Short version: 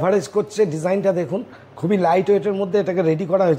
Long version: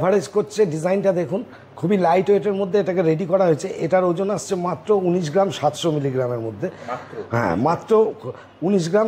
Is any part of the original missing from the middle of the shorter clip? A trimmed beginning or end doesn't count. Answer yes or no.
no